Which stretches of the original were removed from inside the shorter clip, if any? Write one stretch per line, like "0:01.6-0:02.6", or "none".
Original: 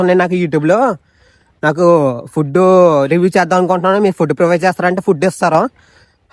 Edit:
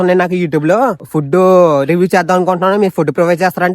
0:01.1-0:02.3